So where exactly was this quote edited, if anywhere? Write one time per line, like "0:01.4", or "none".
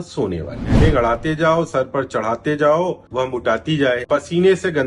0:00.8
0:03.0
0:04.0

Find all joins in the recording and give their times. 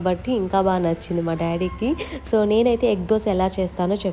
none

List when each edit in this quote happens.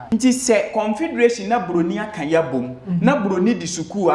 none

